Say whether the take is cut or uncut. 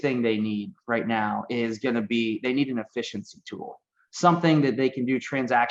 uncut